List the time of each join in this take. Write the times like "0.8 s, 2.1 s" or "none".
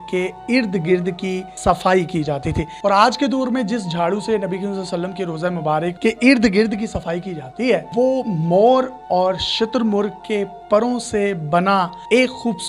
2.7 s, 5.9 s, 7.9 s